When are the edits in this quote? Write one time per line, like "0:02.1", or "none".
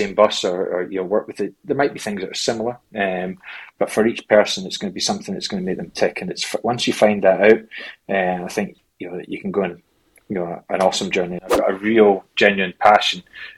0:11.5